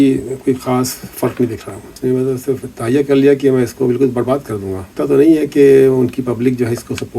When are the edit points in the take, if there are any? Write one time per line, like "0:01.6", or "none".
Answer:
0:01.8
0:04.9